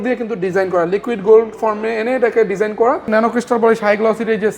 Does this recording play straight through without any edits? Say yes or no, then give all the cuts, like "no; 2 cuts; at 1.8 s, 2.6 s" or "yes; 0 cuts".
no; 1 cut; at 3.1 s